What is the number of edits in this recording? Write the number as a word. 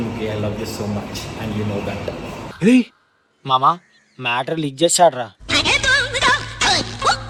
zero